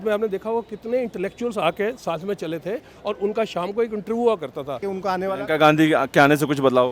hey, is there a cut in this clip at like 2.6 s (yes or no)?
no